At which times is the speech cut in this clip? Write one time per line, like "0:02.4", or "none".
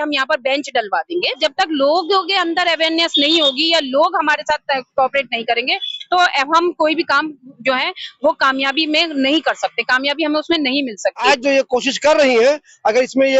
0:01.4
0:11.2

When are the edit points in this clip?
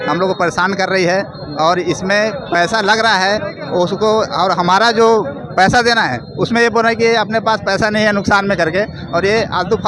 none

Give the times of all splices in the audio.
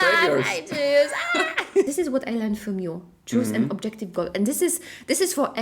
0:01.9

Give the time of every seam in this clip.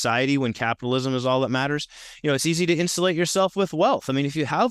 none

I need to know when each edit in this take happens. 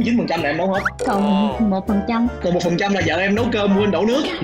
none

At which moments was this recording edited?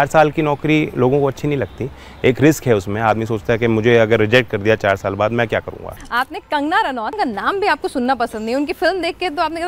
0:05.8
0:07.1

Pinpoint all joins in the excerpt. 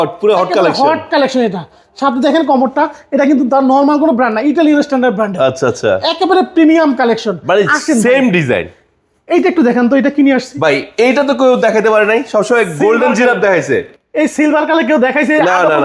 none

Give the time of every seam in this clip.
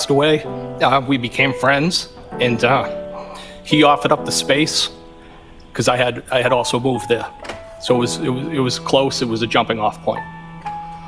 none

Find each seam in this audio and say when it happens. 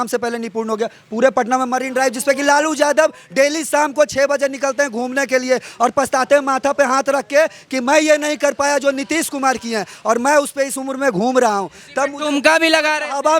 none

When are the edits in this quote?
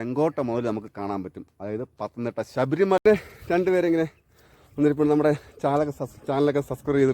0:03.0

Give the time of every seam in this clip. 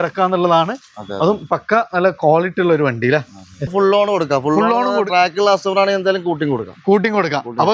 0:03.7

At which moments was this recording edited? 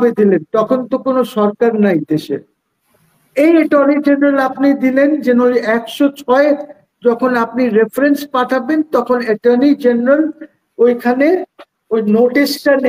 none

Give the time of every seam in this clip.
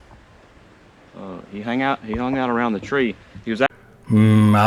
0:03.7

